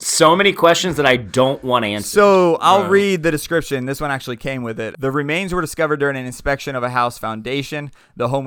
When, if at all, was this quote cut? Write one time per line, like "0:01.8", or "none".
0:04.9